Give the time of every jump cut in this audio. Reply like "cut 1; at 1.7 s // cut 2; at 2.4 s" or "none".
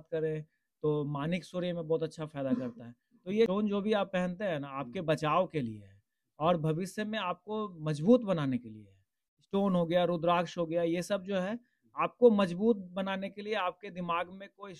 cut 1; at 3.5 s